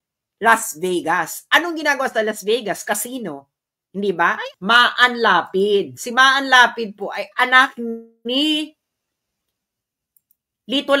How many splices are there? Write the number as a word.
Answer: one